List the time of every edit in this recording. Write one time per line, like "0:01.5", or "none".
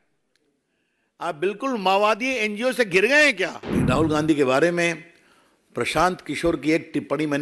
0:03.6